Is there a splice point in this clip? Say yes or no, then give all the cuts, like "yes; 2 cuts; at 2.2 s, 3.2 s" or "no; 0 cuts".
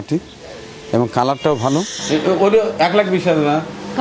yes; 1 cut; at 2.0 s